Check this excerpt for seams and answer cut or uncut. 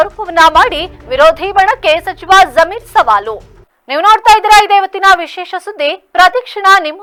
uncut